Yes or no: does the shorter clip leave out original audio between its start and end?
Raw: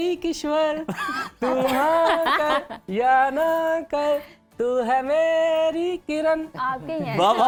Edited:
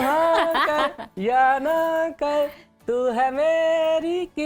no